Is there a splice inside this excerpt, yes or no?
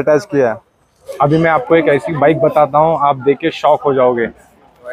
yes